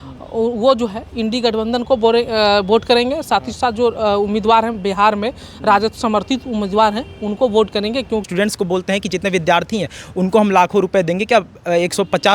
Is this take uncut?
no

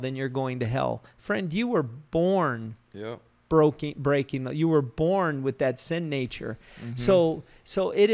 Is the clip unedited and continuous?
yes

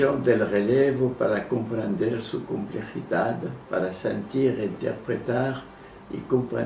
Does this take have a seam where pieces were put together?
yes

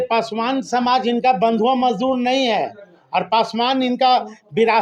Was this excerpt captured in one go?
yes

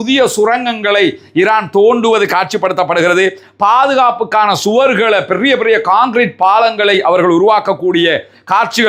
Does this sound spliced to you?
no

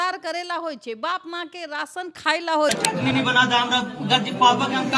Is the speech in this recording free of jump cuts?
no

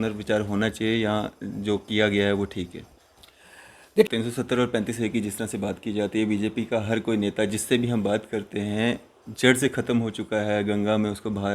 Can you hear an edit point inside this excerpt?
yes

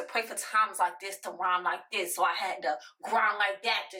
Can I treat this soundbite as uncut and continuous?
yes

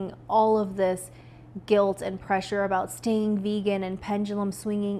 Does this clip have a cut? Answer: no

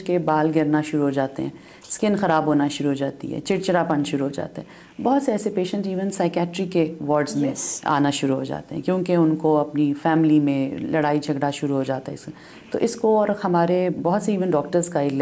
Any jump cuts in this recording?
no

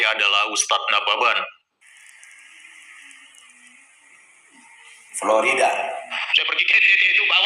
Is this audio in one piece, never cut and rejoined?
no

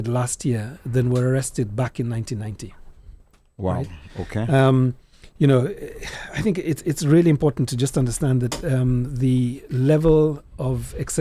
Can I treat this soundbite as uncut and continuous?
yes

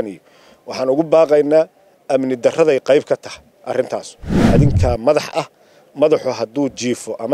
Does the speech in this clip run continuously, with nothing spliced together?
no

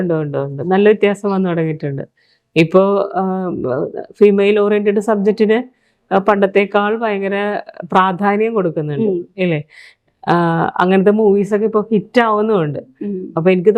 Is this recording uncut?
yes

